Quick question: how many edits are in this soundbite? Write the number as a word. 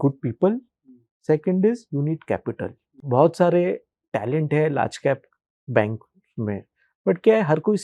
one